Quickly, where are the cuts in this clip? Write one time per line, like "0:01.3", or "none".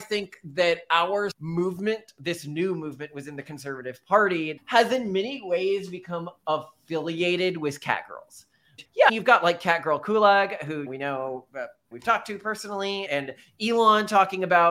0:04.6